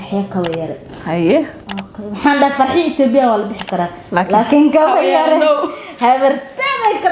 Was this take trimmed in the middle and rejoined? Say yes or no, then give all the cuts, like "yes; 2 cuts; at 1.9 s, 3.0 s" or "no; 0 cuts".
no; 0 cuts